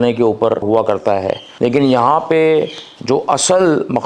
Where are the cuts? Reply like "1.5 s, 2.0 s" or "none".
1.0 s